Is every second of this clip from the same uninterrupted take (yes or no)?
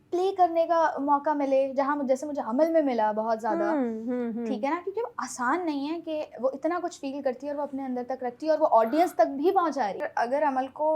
no